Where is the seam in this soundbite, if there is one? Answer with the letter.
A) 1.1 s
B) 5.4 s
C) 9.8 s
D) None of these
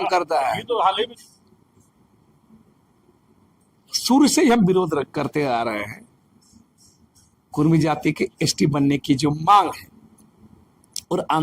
A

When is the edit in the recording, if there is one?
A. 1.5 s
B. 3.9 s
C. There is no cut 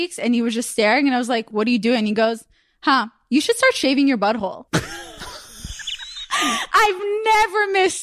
A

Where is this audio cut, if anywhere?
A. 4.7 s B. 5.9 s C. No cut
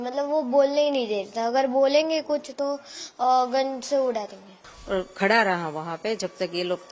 A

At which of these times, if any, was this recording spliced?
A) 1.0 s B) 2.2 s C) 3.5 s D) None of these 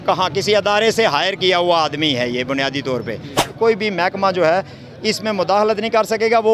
C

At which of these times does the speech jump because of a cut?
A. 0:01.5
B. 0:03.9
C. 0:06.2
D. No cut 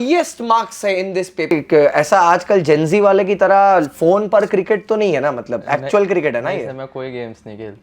A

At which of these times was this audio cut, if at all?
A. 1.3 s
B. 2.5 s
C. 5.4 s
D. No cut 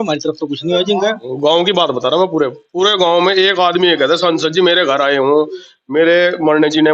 A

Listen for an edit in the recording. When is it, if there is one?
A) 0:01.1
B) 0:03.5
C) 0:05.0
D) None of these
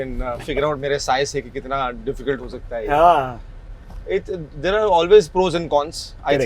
D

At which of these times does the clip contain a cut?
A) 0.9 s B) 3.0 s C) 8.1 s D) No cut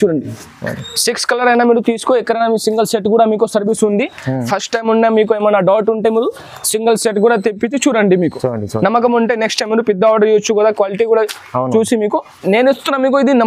D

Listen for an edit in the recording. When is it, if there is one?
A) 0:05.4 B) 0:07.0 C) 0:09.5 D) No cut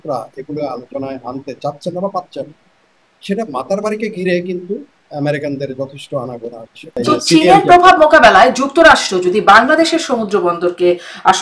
B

